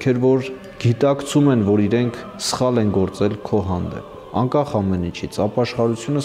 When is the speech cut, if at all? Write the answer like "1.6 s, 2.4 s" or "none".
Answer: 4.2 s